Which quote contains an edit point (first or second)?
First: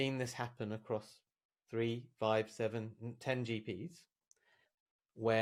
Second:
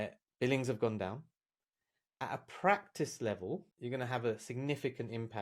second